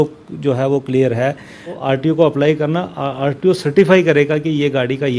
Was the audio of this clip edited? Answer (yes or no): yes